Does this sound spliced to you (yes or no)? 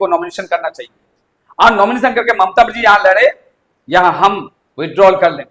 no